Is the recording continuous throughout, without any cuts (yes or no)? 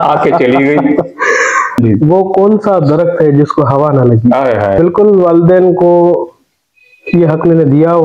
no